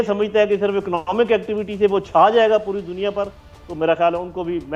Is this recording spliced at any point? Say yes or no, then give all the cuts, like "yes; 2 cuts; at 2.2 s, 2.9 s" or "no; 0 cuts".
no; 0 cuts